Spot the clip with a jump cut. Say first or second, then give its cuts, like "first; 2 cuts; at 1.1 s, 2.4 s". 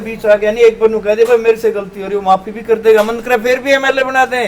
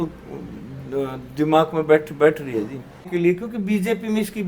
second; 1 cut; at 3.1 s